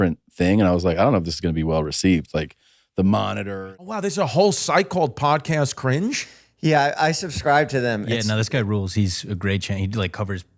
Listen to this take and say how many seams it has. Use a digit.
1